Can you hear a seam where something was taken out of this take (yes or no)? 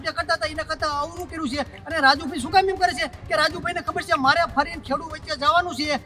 no